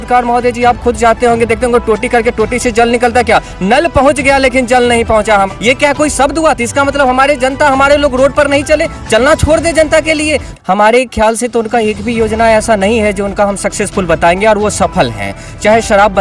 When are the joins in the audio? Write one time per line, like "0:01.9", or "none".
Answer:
0:05.5
0:10.5